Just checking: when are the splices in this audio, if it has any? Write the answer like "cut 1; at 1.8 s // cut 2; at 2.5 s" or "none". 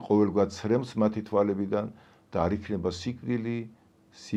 none